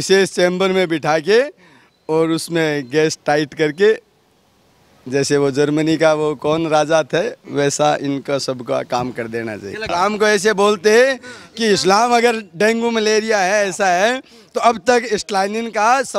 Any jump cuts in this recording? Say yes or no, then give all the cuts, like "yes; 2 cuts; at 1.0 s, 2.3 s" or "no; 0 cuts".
yes; 1 cut; at 9.9 s